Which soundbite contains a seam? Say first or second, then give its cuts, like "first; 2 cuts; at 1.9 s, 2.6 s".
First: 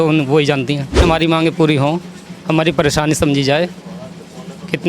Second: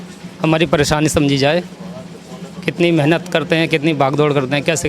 first; 1 cut; at 1.0 s